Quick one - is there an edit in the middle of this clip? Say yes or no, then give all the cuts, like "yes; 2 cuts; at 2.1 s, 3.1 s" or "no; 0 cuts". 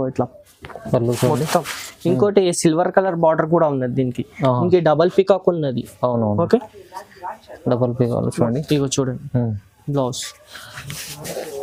no; 0 cuts